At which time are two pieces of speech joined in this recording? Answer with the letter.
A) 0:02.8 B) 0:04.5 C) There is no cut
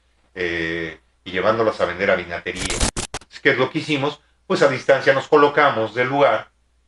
A